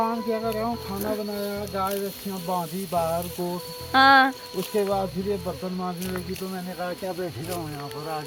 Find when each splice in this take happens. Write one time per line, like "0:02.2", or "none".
none